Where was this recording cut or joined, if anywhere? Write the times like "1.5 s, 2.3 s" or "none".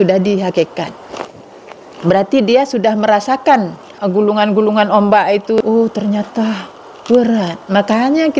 3.8 s, 5.6 s

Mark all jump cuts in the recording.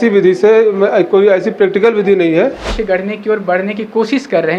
2.7 s

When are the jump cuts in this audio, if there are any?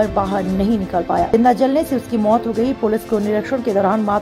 1.3 s

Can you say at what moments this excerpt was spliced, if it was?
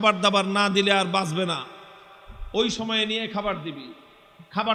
none

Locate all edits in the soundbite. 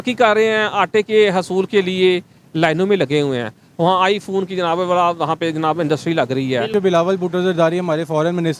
6.7 s

